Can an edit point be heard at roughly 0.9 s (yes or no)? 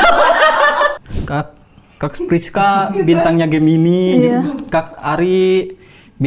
yes